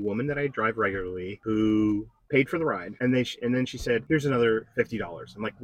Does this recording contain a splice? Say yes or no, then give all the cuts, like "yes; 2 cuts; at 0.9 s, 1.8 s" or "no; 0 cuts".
yes; 3 cuts; at 1.3 s, 2.9 s, 4.0 s